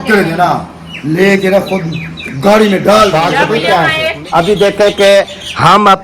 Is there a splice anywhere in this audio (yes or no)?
yes